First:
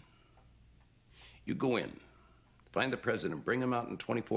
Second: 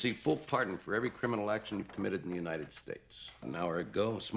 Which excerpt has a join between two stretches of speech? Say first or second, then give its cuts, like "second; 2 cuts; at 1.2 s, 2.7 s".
second; 1 cut; at 3.4 s